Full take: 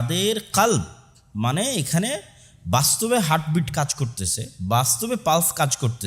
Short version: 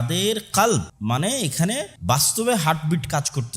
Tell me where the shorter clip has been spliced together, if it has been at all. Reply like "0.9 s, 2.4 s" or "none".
0.9 s, 1.9 s